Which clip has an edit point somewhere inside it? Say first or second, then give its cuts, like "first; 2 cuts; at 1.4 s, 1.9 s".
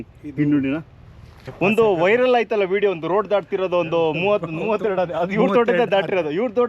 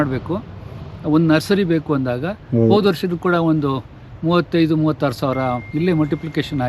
first; 1 cut; at 1.4 s